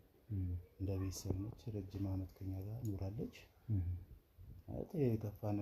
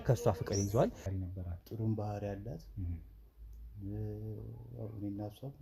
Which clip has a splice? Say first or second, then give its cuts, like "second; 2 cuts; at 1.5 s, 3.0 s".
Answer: second; 1 cut; at 1.1 s